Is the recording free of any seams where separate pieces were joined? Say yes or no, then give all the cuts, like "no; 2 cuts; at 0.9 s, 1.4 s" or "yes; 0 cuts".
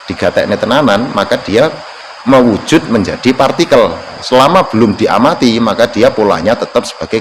no; 1 cut; at 4.2 s